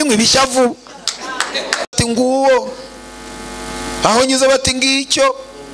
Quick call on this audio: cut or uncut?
cut